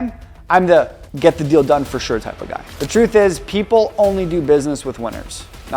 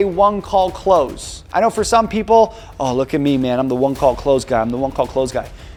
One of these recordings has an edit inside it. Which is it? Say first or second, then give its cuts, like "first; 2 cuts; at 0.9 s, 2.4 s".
first; 1 cut; at 2.7 s